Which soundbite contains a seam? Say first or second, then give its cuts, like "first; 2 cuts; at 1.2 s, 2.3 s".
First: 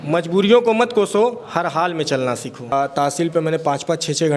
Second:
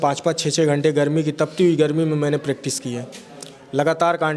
first; 1 cut; at 2.7 s